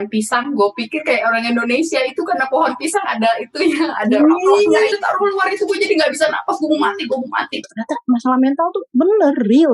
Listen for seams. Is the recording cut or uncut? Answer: cut